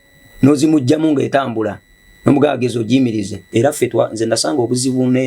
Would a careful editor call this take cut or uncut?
cut